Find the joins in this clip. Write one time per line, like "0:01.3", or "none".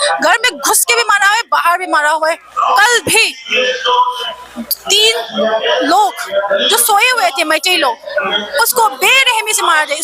none